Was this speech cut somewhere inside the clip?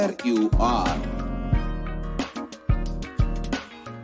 no; 0 cuts

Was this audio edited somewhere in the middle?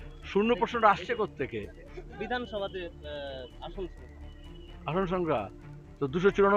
no; 0 cuts

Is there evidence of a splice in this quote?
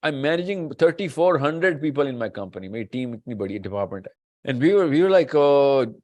yes; 1 cut; at 4.4 s

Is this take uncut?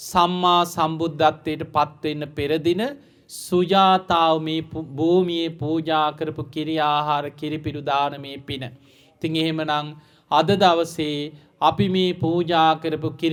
yes; 0 cuts

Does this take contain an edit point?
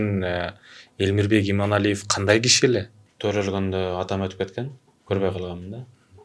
yes; 1 cut; at 3.0 s

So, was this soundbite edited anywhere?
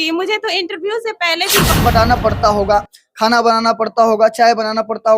yes; 1 cut; at 1.7 s

